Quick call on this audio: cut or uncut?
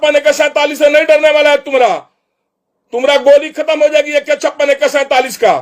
uncut